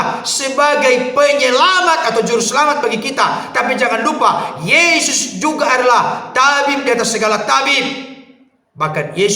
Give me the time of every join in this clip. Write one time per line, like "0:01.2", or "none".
none

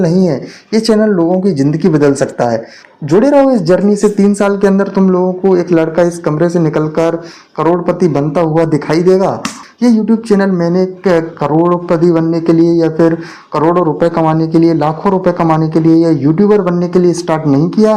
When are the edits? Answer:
0:02.8
0:09.6

